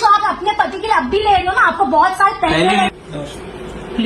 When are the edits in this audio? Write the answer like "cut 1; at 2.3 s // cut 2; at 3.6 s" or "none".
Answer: cut 1; at 2.9 s